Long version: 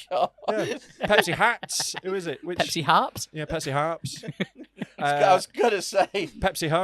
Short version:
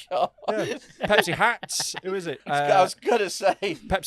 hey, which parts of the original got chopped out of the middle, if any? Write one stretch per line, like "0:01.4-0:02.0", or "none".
0:02.4-0:04.9